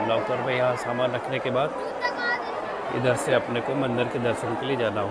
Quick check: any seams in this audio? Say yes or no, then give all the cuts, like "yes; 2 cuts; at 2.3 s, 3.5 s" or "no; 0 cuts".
no; 0 cuts